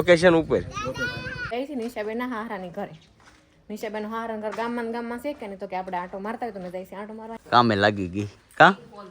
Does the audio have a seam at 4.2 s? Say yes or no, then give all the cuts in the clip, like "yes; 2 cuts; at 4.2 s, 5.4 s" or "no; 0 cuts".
no; 2 cuts; at 1.4 s, 7.3 s